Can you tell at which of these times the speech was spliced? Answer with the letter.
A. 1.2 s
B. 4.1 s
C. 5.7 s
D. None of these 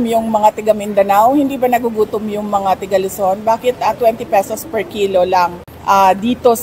C